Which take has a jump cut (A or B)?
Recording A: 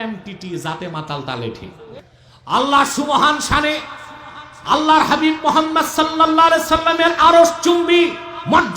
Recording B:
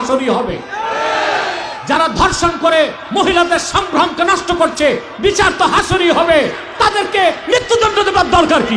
A